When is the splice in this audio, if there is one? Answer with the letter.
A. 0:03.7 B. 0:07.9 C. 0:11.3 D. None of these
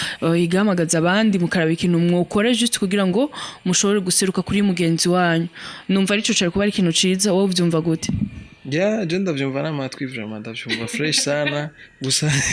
D